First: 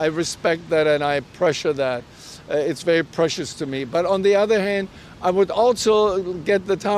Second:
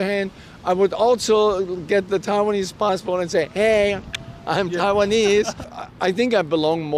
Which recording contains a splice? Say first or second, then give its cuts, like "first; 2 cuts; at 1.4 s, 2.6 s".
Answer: second; 1 cut; at 5.7 s